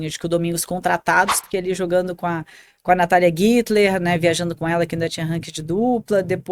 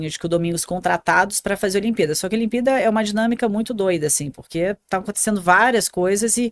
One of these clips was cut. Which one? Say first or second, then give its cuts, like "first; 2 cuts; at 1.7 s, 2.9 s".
first; 1 cut; at 1.4 s